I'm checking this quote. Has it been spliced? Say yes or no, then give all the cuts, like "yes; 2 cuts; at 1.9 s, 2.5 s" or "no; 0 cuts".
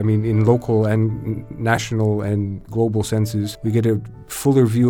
yes; 2 cuts; at 2.6 s, 3.5 s